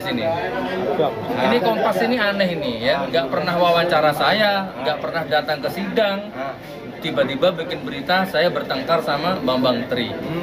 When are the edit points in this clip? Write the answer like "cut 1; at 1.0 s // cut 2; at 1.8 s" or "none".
none